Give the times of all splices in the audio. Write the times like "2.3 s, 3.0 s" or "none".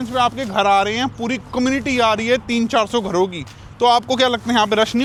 none

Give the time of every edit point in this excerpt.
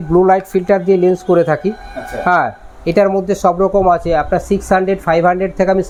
none

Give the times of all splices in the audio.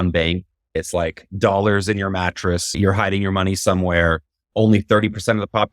2.7 s

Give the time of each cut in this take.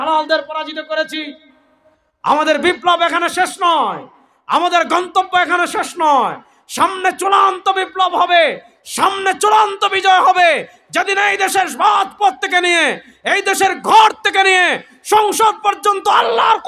none

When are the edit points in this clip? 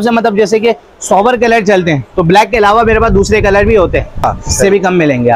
4.4 s

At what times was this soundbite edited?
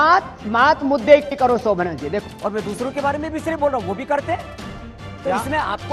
2.3 s

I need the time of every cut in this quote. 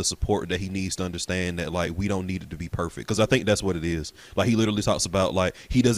none

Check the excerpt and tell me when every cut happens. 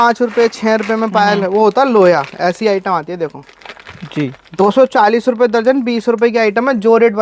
none

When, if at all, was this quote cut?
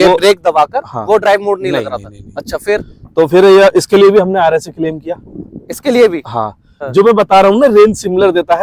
6.8 s

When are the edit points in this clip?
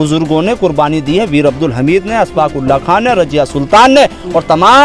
none

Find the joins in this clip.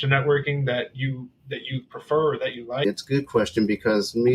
2.8 s

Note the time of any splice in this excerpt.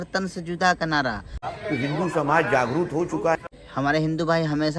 1.4 s

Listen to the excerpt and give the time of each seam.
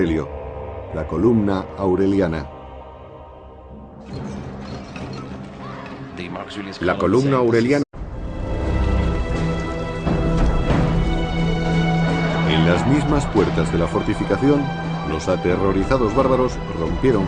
none

